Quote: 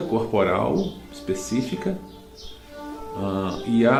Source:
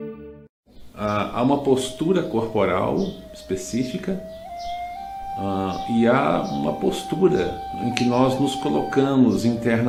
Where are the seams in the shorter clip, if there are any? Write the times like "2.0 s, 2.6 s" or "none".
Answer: none